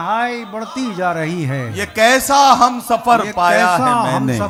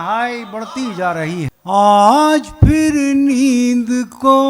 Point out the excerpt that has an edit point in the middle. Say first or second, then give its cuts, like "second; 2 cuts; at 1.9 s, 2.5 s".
second; 1 cut; at 1.5 s